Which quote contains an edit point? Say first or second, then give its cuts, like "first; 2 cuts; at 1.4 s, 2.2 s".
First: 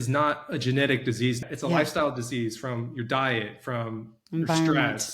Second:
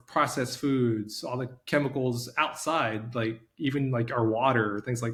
first; 1 cut; at 1.4 s